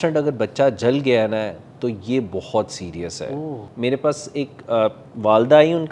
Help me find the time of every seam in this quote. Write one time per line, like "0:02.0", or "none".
0:03.6